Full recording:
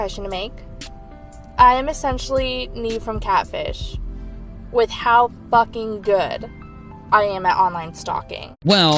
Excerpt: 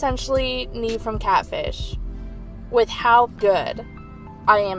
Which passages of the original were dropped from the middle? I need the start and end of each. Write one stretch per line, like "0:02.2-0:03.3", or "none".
0:05.4-0:06.0